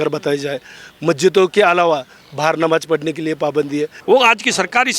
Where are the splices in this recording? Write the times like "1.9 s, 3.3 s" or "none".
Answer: 4.0 s